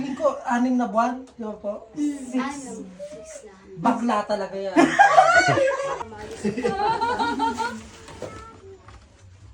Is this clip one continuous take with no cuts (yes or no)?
no